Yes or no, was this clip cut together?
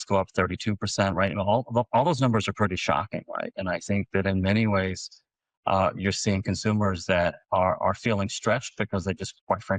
no